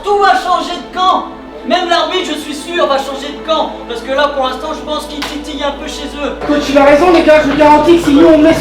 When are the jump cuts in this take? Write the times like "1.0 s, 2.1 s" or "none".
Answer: 6.3 s